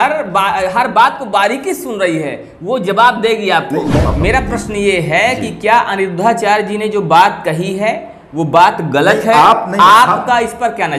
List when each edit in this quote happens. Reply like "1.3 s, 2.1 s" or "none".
4.1 s